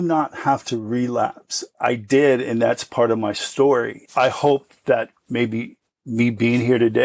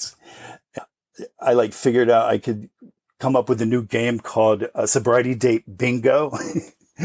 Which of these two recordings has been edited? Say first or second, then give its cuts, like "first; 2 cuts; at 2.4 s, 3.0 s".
first; 2 cuts; at 1.7 s, 4.0 s